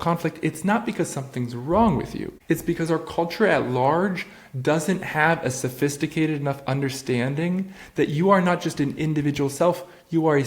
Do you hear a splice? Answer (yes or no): yes